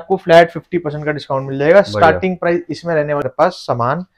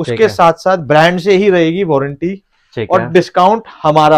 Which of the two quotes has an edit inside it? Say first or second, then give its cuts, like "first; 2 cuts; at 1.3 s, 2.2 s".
first; 1 cut; at 3.2 s